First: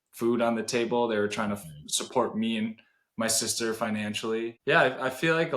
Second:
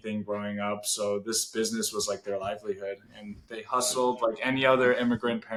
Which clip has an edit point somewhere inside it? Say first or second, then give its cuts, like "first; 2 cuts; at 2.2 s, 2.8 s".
first; 1 cut; at 4.6 s